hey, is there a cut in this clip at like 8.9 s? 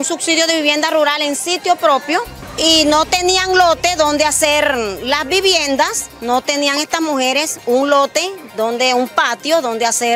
no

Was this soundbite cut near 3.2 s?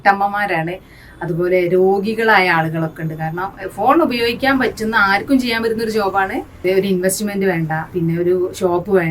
no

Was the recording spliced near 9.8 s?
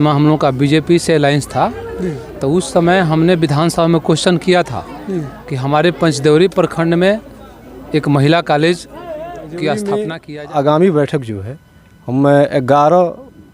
yes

